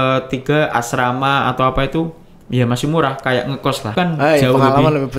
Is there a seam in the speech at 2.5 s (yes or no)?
no